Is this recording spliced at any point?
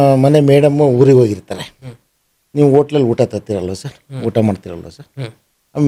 no; 0 cuts

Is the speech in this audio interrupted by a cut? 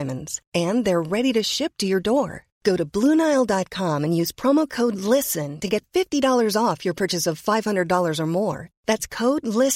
no; 0 cuts

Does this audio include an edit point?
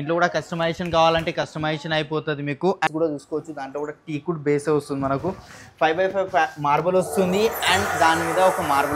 yes; 1 cut; at 2.9 s

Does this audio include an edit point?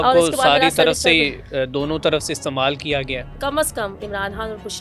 yes; 1 cut; at 3.4 s

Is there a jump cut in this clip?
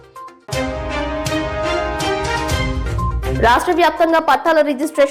no; 0 cuts

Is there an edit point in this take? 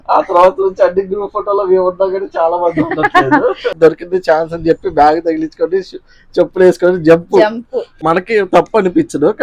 yes; 2 cuts; at 3.7 s, 7.9 s

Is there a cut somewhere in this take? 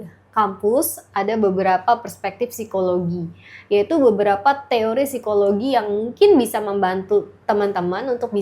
no; 0 cuts

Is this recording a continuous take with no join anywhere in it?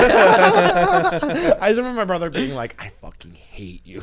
yes; 0 cuts

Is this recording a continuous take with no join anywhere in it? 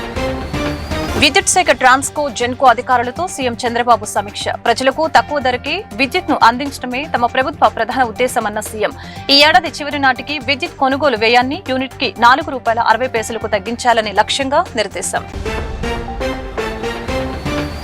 no; 1 cut; at 1.1 s

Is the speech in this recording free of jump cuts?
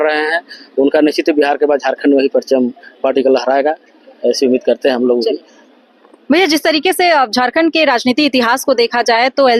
yes; 0 cuts

